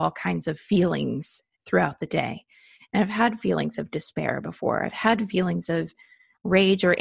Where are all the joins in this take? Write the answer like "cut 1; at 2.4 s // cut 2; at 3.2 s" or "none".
none